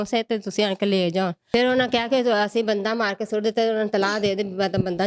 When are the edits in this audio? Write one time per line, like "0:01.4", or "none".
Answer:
0:01.4